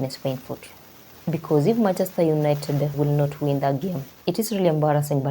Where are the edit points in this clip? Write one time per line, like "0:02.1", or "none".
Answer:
0:04.1